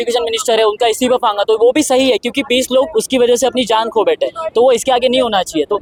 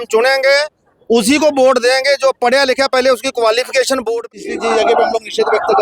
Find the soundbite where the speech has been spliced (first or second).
second